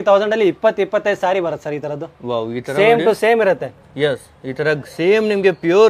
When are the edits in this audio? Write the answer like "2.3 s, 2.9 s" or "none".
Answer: none